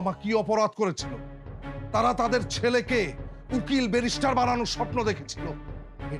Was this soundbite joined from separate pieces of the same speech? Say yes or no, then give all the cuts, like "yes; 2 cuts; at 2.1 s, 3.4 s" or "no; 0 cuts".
no; 0 cuts